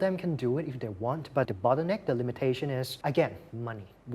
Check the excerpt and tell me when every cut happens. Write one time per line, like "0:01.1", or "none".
0:01.5
0:02.9